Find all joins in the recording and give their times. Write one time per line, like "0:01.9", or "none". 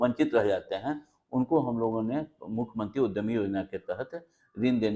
none